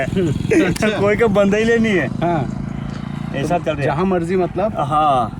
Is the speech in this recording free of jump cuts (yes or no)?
yes